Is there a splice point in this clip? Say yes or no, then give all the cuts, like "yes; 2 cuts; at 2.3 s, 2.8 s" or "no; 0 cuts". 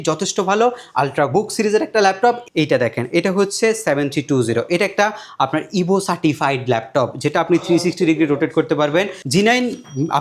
yes; 2 cuts; at 2.4 s, 9.2 s